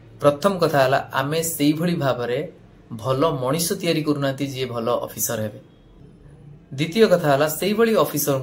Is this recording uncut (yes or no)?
yes